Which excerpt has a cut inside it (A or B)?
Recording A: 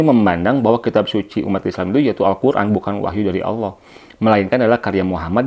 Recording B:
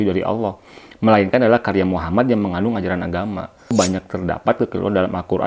B